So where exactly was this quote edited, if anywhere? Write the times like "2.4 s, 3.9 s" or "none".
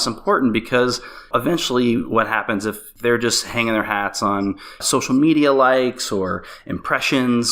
1.3 s, 2.9 s, 4.8 s